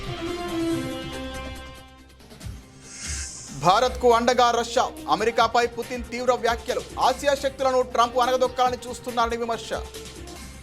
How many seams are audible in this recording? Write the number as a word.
one